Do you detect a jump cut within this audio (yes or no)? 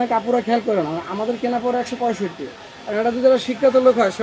no